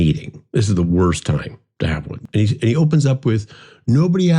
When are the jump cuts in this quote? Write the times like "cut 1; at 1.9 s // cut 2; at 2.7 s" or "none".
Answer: cut 1; at 2.1 s

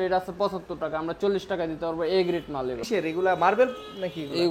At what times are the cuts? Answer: cut 1; at 2.8 s

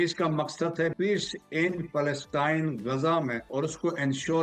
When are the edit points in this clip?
cut 1; at 0.9 s // cut 2; at 3.4 s

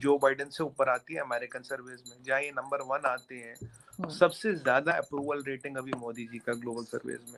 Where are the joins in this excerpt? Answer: none

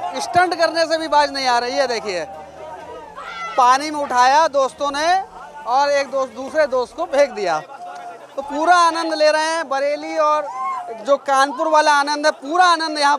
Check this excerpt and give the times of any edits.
none

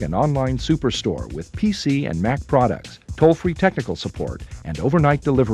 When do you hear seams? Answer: none

